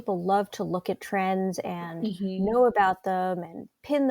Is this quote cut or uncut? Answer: uncut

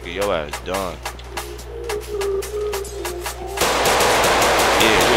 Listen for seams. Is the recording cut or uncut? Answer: uncut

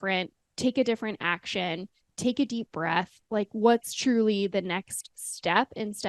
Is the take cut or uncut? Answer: uncut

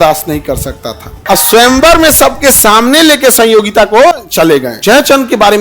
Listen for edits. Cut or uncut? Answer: cut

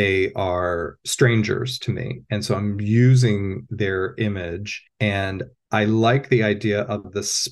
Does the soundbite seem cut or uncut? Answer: cut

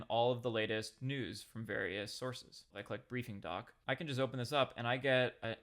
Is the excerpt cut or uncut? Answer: cut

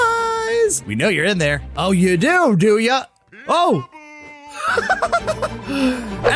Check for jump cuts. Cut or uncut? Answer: uncut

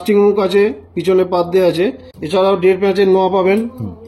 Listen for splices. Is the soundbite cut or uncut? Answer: cut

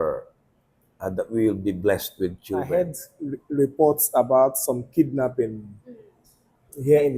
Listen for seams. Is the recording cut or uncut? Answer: cut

